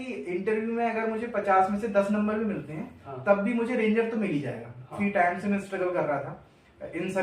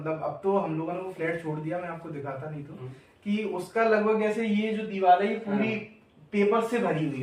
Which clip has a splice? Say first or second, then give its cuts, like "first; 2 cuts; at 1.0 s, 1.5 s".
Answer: first; 1 cut; at 5.0 s